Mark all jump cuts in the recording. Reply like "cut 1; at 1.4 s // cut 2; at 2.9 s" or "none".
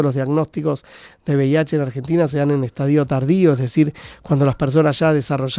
none

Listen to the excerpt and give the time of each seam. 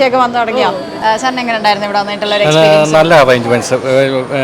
cut 1; at 0.9 s

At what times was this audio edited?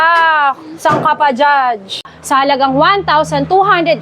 cut 1; at 2.1 s

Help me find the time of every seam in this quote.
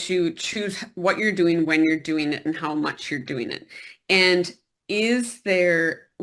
none

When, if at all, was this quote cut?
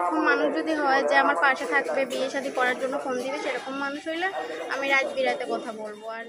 none

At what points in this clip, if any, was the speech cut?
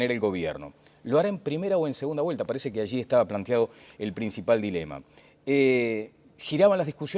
cut 1; at 5.7 s

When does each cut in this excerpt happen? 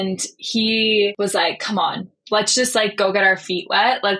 cut 1; at 1.1 s

